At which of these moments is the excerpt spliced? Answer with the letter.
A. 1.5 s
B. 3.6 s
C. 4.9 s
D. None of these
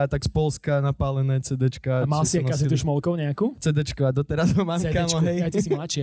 B